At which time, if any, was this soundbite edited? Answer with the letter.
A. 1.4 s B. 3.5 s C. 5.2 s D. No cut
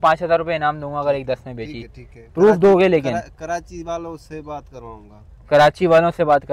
D